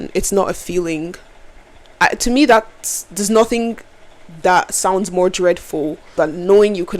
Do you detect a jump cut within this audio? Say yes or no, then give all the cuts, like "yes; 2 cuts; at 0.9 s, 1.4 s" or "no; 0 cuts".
yes; 2 cuts; at 1.8 s, 6.1 s